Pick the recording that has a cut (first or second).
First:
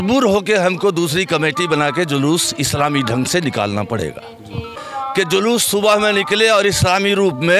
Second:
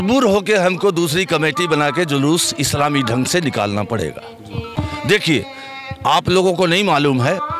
first